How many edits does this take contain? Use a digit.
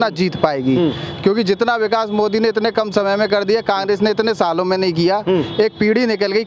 0